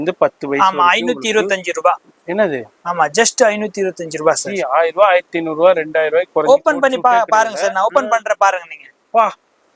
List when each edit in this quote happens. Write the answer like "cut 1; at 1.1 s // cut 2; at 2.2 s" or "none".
none